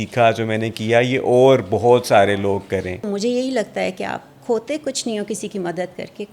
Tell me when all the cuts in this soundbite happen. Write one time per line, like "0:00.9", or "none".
0:03.1